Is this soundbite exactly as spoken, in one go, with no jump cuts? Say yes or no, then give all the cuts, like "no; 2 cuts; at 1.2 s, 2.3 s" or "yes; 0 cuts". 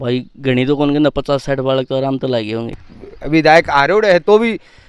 no; 1 cut; at 2.7 s